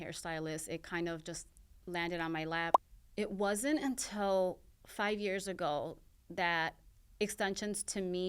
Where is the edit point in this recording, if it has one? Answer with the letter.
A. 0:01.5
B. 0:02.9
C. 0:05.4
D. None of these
B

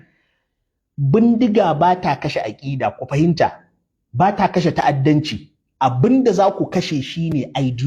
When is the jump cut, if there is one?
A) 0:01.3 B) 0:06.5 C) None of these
A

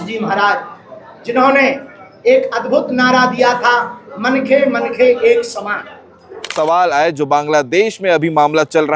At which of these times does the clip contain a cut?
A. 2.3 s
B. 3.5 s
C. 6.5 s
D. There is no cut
C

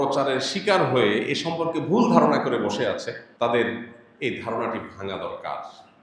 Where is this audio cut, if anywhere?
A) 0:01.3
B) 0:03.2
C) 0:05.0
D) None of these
B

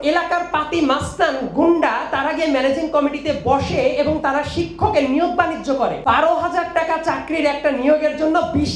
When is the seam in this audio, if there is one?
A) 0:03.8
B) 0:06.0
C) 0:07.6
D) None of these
B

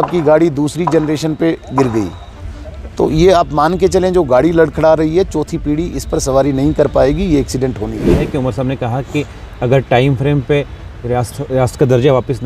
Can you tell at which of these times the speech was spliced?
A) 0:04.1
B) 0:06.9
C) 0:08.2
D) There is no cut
C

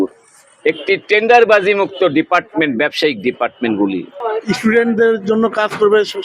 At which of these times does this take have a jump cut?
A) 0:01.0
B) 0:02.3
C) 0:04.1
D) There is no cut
C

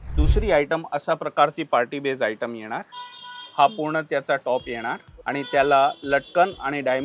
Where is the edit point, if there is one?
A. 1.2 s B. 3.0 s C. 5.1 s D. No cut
C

